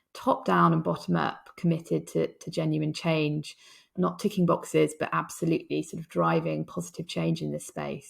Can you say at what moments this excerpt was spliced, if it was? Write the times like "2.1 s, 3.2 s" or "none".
3.9 s